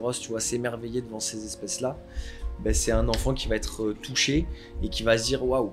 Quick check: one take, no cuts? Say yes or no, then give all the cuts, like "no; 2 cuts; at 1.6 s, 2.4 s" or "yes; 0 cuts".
yes; 0 cuts